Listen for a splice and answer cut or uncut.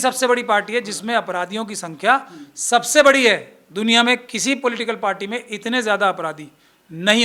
uncut